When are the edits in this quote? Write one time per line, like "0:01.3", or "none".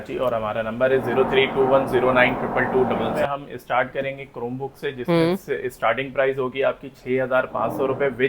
0:03.2